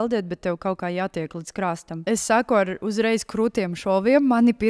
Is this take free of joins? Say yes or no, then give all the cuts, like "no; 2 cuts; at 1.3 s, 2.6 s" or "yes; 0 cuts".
no; 1 cut; at 2.0 s